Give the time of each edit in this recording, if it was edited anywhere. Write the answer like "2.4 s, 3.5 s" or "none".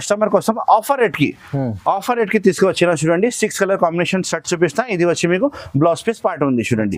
none